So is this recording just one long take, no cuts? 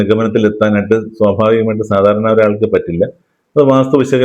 yes; 0 cuts

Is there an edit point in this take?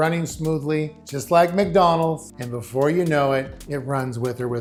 no; 0 cuts

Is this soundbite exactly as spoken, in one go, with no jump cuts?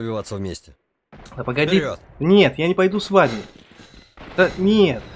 yes; 0 cuts

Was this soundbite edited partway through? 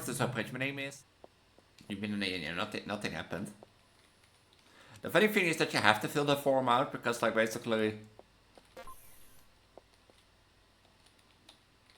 yes; 1 cut; at 0.9 s

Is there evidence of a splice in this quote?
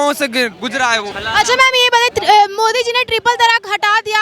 yes; 1 cut; at 1.1 s

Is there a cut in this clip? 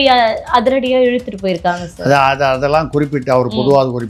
no; 0 cuts

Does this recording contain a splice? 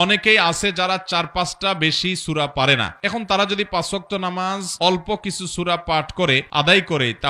no; 0 cuts

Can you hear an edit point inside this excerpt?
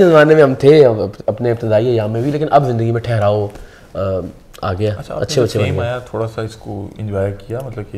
no; 0 cuts

